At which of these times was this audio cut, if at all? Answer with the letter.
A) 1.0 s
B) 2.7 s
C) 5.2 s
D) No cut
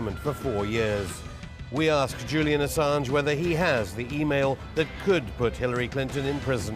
B